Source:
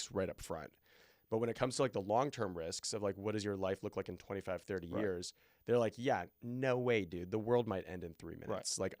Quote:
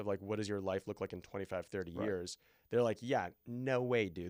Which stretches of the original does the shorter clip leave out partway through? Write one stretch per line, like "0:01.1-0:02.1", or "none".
none